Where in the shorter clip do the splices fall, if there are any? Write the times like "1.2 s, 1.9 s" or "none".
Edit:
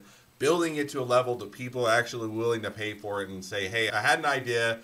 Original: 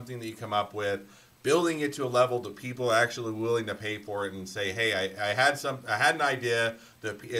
3.9 s